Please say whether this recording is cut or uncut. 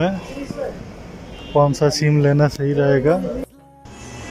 cut